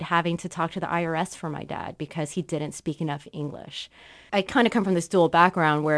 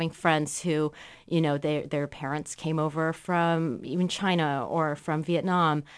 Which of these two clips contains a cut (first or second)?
first